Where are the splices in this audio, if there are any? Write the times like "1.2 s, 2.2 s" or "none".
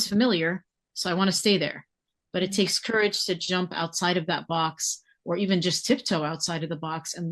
none